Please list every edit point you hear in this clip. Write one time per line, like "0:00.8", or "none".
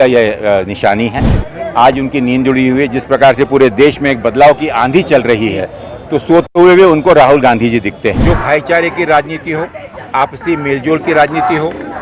0:08.2